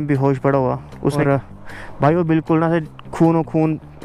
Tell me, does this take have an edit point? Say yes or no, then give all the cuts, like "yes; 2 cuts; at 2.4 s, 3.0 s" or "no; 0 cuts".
yes; 1 cut; at 1.2 s